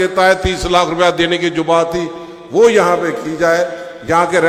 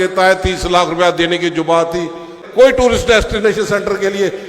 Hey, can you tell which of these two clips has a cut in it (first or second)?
second